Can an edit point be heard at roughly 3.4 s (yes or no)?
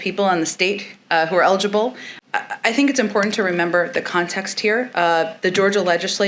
no